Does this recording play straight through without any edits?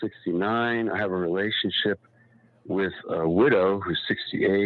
no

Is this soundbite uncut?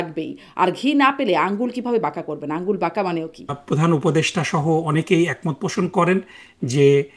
no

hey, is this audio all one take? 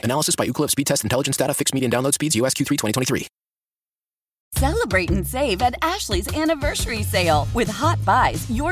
no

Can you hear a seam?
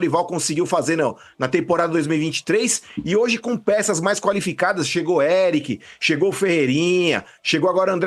no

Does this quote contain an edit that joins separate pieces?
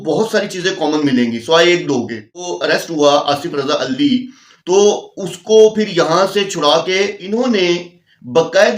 yes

